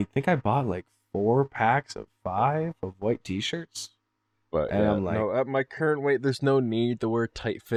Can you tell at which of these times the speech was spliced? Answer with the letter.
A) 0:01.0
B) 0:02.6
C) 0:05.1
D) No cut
D